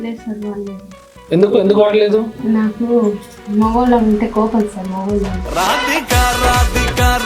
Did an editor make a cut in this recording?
yes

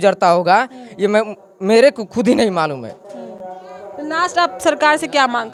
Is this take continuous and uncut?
yes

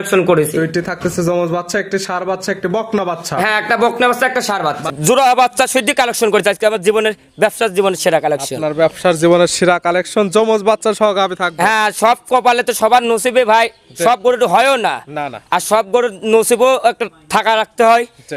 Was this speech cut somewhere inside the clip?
yes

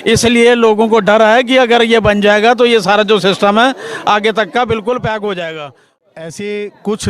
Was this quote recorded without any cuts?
no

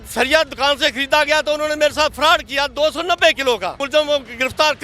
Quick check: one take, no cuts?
no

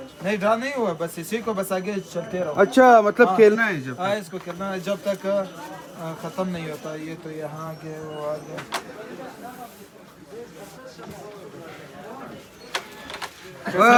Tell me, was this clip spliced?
no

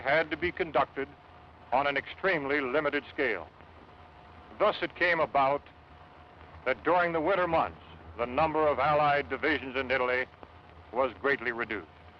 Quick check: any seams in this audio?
yes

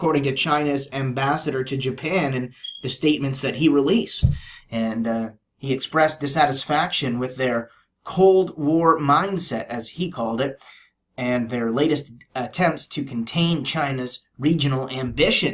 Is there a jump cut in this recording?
no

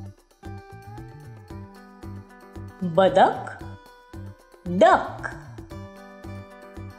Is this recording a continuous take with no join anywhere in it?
yes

